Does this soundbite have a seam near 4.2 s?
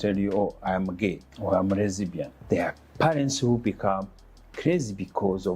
no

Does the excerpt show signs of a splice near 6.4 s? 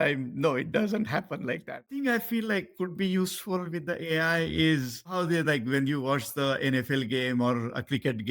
no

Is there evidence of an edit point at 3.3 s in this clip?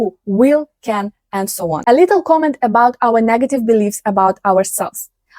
no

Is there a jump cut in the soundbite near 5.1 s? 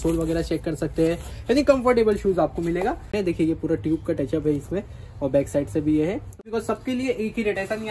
no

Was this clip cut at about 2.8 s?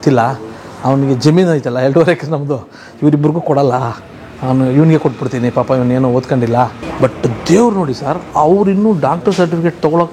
no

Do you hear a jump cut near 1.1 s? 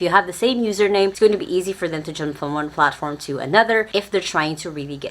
yes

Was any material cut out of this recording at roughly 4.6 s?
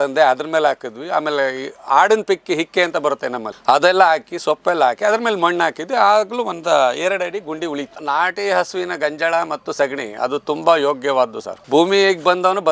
no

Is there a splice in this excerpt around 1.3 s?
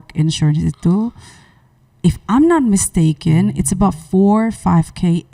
no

